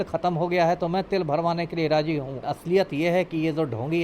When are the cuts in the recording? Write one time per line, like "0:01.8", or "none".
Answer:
0:02.5